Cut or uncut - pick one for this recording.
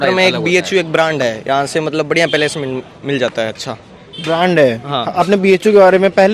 uncut